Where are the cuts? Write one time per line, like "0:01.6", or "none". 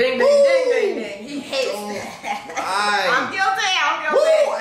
none